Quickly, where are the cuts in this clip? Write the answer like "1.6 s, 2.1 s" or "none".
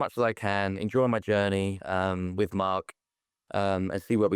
none

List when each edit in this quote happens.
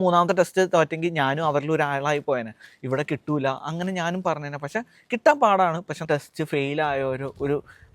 6.0 s

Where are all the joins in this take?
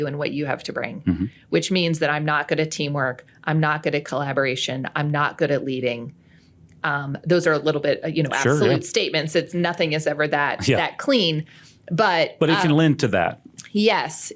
none

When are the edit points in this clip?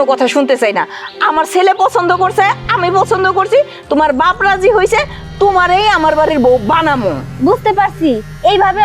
none

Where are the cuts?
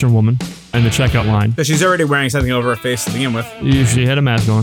none

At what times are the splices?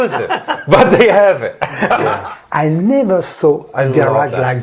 2.1 s

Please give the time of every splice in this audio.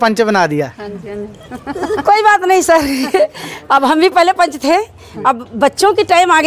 none

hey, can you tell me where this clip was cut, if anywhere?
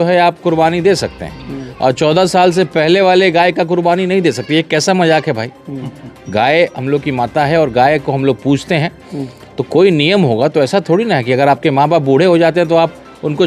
none

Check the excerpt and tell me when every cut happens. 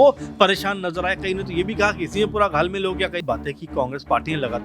3.2 s

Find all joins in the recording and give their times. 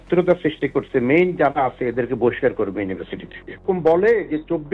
3.6 s

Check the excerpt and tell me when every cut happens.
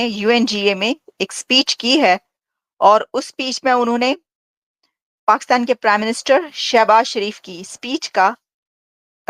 none

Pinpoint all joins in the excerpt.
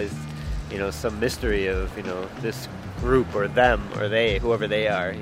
none

